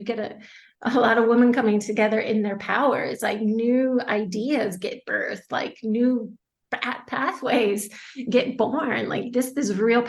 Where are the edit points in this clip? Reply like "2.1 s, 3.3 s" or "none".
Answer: none